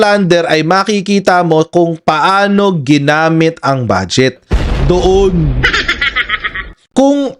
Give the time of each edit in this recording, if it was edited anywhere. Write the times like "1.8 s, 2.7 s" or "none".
none